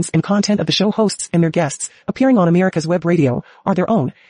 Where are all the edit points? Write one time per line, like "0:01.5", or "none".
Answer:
none

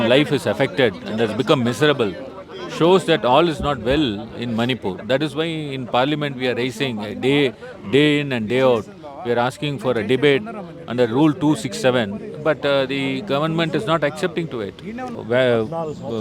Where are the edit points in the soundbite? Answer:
0:15.2

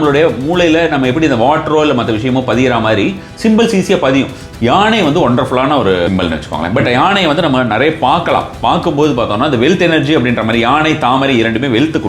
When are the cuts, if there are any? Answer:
0:04.4
0:06.1

